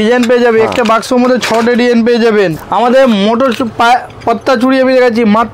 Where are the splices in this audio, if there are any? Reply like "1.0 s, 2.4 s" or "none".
2.6 s